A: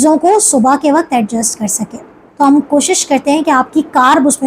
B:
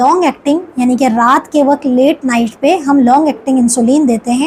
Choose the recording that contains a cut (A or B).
A